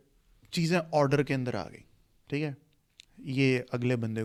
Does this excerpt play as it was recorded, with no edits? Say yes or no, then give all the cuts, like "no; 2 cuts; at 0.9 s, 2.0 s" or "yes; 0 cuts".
yes; 0 cuts